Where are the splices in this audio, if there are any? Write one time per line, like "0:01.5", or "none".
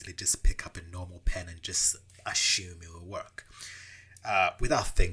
none